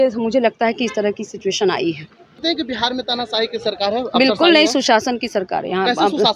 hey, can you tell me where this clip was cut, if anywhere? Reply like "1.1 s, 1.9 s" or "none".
2.4 s